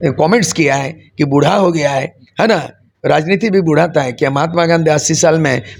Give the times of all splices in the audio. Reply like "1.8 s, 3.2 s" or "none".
none